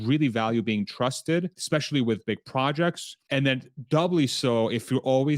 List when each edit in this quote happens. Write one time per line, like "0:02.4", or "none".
0:01.6
0:03.1